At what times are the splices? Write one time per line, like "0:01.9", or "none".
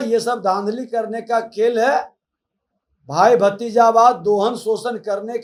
none